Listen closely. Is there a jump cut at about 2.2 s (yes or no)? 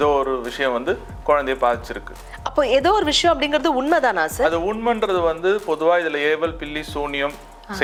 no